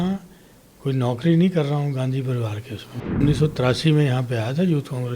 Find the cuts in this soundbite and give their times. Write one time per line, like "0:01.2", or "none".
0:03.2